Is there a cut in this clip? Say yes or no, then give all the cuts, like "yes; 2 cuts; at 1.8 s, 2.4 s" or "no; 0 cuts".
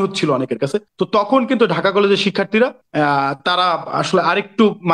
yes; 2 cuts; at 0.9 s, 2.8 s